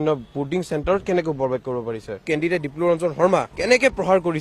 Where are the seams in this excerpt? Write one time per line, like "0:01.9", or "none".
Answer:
0:02.2